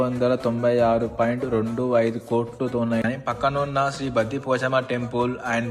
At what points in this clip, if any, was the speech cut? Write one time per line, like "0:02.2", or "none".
0:03.0